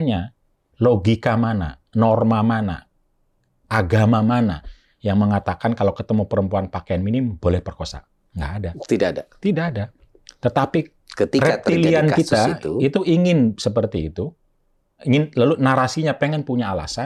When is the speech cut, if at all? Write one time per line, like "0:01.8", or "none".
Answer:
none